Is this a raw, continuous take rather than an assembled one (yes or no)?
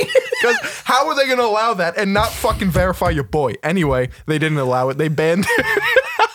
yes